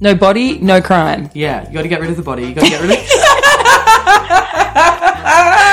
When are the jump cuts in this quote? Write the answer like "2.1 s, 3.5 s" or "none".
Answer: 1.3 s